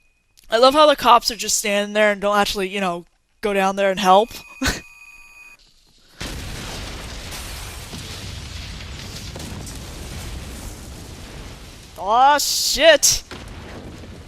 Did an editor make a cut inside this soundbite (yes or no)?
yes